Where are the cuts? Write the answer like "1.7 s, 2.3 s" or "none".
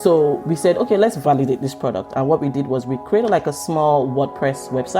1.2 s